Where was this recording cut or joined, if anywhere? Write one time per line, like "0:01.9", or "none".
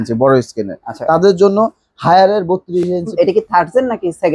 0:03.1

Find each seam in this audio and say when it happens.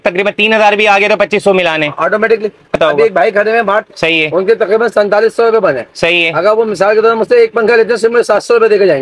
0:02.8
0:03.9

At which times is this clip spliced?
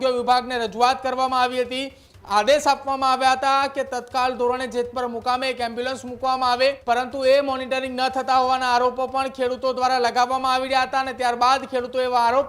0:06.8

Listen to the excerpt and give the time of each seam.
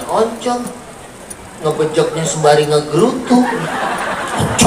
none

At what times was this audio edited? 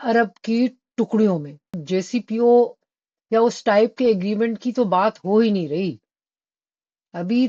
0:01.8

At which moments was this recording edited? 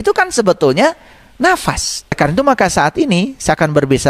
0:02.2

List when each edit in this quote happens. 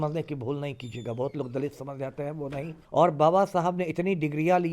0:02.7

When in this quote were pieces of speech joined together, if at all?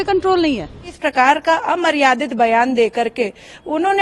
0:01.0

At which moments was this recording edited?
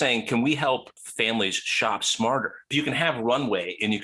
0:01.0
0:02.7

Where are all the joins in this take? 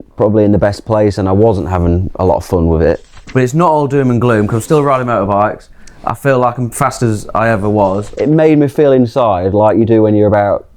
0:03.1
0:08.1

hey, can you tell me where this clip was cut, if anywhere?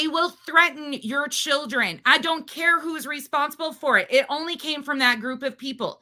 none

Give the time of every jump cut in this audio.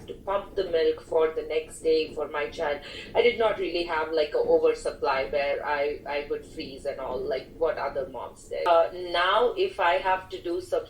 0:08.7

